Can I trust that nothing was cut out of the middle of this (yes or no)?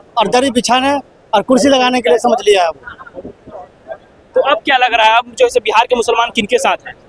yes